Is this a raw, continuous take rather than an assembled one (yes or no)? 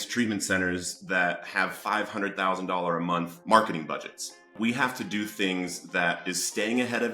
no